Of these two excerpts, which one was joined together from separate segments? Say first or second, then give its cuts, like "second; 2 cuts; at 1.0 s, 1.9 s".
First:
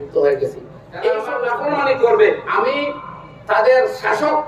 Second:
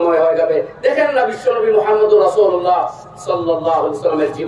first; 2 cuts; at 1.3 s, 2.4 s